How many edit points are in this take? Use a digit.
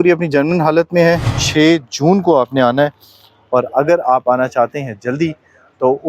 1